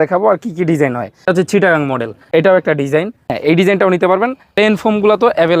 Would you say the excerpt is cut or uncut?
cut